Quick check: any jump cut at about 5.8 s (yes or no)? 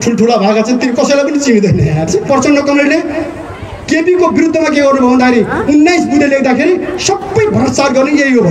no